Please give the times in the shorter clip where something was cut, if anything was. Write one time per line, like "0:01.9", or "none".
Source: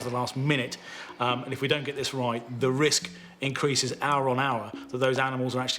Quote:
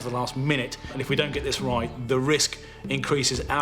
0:00.9